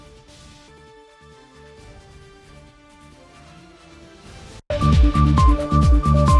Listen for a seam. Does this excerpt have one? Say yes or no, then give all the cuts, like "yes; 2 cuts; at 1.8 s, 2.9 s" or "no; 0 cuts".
no; 0 cuts